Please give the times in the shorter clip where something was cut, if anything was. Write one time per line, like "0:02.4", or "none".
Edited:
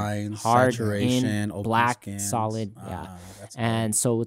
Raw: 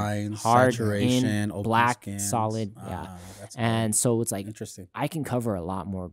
none

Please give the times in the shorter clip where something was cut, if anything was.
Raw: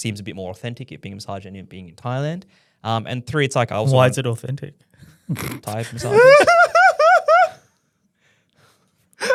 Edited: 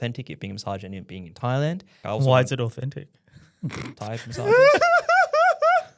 0:02.0

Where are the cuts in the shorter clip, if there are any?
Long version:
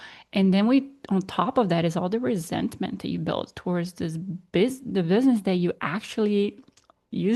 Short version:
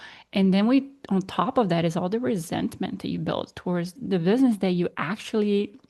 0:03.9

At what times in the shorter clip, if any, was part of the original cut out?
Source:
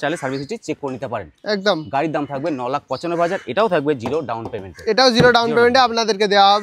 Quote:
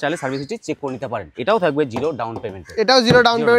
0:01.4

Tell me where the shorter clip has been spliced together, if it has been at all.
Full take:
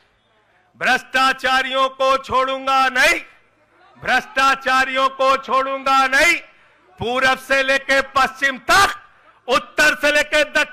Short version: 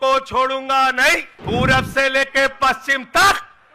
0:01.3

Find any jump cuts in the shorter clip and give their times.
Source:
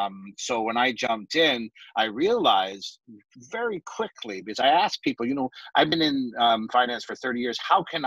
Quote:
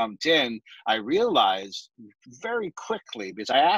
none

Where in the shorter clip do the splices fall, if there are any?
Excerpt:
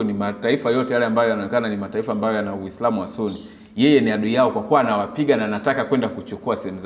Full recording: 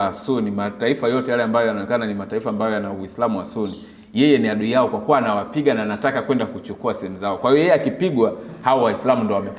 none

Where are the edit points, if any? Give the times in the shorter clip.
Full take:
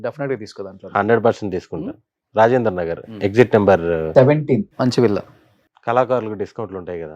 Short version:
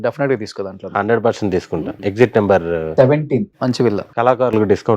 0:01.9
0:04.1

